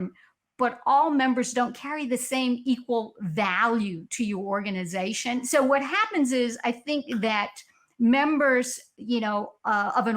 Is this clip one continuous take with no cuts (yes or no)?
no